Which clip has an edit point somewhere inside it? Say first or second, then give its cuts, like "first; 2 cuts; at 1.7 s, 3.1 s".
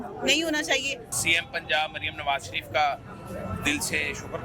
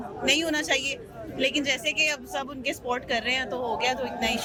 first; 1 cut; at 1.1 s